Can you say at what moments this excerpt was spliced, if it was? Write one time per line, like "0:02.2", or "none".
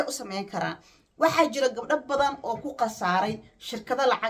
none